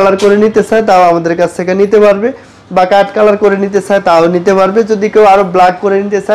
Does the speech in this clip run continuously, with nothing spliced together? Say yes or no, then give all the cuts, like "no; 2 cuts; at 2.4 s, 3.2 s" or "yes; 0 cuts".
yes; 0 cuts